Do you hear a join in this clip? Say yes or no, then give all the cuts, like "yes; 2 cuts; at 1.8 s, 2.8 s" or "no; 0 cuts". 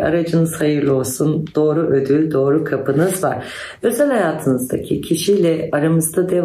no; 0 cuts